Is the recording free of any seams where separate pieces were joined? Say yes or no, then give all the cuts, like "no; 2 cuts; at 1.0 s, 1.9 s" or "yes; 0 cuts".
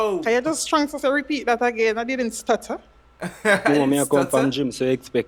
yes; 0 cuts